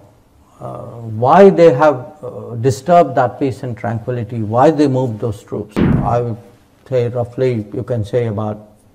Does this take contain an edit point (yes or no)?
yes